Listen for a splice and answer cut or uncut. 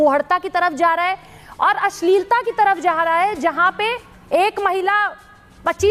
cut